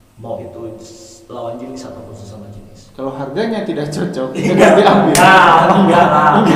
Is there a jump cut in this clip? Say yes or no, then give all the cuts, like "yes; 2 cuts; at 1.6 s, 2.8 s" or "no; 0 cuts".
no; 0 cuts